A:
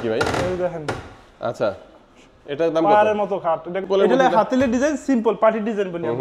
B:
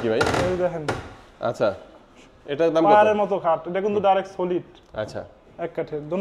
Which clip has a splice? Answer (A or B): A